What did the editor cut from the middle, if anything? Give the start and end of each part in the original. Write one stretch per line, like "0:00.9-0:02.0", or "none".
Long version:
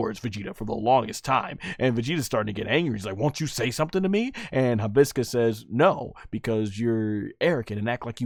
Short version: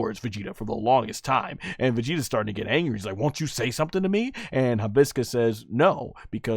none